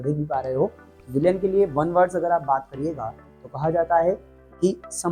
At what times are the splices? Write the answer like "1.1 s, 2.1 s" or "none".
none